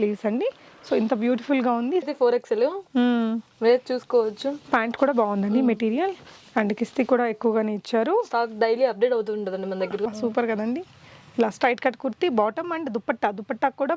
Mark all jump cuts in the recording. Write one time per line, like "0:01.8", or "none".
0:02.1
0:10.0